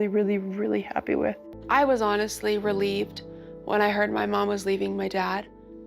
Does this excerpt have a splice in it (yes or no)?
yes